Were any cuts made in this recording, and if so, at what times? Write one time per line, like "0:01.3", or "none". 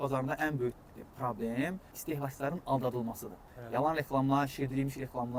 none